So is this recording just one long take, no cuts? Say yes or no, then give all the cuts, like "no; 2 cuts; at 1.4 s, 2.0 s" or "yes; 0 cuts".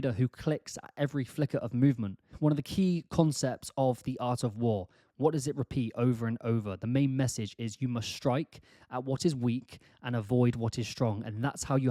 no; 1 cut; at 2.3 s